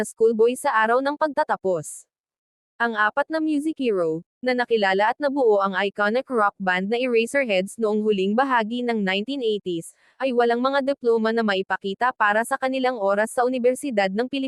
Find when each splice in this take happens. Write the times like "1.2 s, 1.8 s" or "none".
none